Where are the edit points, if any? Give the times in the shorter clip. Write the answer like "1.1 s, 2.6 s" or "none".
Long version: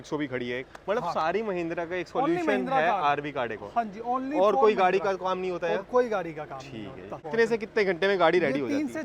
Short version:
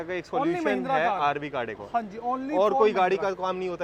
none